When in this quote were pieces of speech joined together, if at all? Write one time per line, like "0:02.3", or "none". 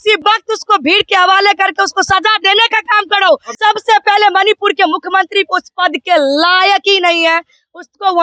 0:03.5